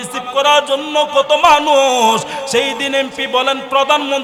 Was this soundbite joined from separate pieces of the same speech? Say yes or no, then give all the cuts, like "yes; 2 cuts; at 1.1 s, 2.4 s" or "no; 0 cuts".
no; 0 cuts